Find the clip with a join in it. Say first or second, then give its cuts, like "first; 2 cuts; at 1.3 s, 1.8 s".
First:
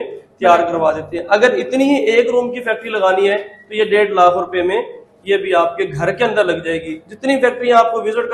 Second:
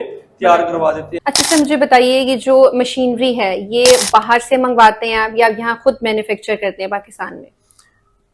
second; 1 cut; at 1.1 s